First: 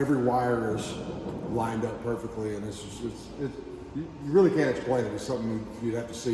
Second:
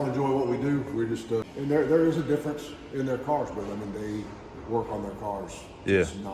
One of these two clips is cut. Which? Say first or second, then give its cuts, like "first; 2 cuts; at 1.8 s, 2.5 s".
second; 1 cut; at 1.5 s